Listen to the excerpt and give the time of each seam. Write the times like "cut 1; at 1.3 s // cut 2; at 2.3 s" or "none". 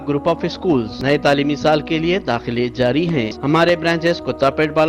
cut 1; at 0.9 s // cut 2; at 3.4 s